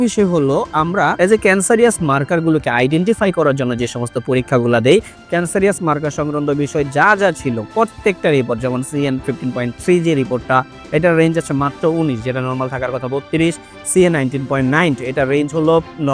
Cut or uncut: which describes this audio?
cut